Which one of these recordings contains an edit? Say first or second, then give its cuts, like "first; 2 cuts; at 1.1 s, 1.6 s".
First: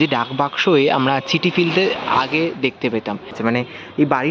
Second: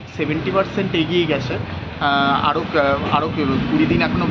first; 1 cut; at 3.3 s